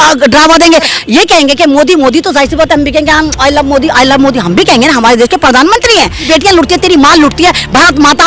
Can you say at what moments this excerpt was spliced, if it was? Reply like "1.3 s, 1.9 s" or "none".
1.0 s, 6.3 s